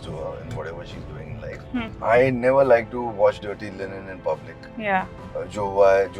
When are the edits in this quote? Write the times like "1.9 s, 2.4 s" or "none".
1.9 s